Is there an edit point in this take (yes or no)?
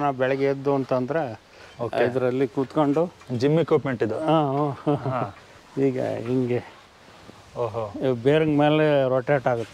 no